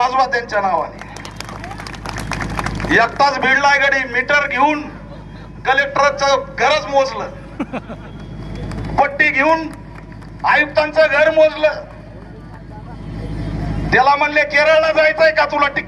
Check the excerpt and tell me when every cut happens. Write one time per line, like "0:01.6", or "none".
none